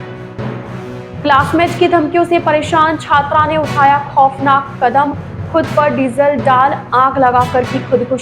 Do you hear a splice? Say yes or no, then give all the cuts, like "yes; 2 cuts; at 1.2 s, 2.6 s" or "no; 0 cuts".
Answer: yes; 1 cut; at 1.1 s